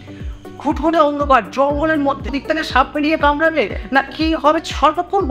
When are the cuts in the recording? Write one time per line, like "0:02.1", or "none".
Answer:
0:02.3
0:04.6